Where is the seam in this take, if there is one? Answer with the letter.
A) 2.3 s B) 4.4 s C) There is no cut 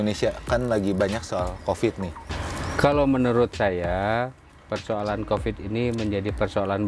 A